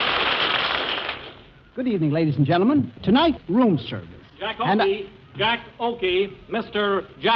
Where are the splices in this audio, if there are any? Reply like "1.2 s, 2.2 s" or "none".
1.8 s